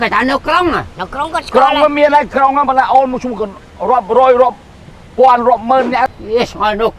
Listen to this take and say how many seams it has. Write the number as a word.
one